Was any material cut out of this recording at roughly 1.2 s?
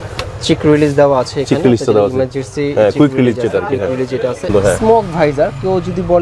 no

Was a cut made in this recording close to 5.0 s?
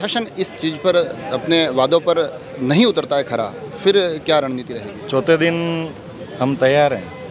no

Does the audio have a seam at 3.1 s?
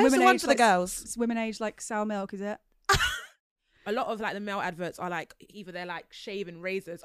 yes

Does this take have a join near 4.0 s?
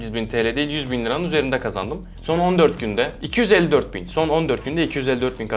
no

